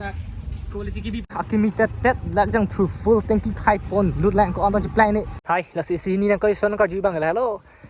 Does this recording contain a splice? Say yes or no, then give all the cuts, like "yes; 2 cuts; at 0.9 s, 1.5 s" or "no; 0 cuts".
yes; 2 cuts; at 1.4 s, 5.3 s